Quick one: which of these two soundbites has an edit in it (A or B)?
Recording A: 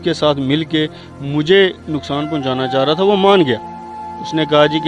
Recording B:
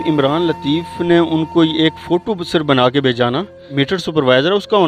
B